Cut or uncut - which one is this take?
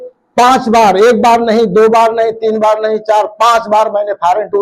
uncut